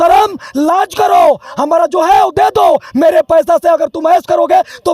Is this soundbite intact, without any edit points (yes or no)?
yes